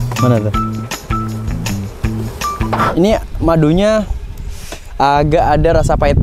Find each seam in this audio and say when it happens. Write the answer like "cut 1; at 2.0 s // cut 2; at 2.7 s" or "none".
cut 1; at 2.9 s